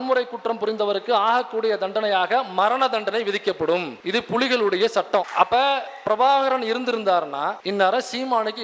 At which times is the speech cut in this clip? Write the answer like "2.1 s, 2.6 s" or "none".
3.9 s, 5.3 s, 7.6 s